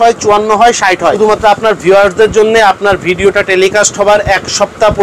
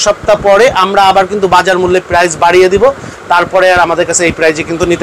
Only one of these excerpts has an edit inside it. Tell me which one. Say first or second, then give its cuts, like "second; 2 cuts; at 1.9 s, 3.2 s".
first; 1 cut; at 1.2 s